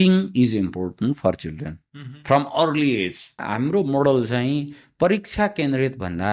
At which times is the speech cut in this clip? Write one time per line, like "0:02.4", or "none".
0:03.4